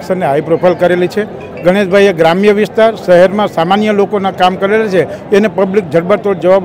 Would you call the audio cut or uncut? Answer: uncut